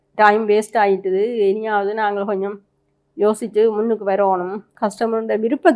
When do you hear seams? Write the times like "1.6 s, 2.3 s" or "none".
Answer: 4.7 s